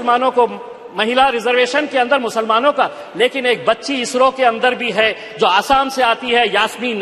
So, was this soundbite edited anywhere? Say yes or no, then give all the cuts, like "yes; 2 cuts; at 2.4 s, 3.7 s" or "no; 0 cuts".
no; 0 cuts